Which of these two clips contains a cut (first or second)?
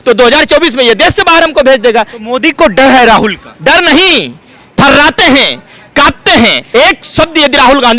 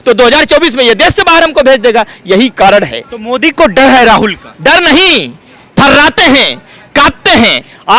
first